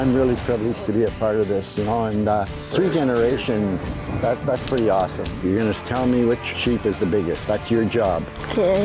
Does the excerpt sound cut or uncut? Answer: cut